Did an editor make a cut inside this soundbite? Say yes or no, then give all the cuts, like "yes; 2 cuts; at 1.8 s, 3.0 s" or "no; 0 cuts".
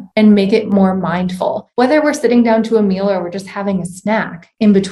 yes; 1 cut; at 1.6 s